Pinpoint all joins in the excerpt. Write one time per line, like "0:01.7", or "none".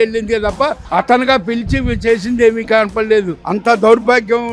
0:03.4